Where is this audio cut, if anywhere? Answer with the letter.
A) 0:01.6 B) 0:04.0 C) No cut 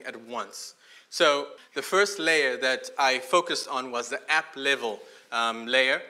A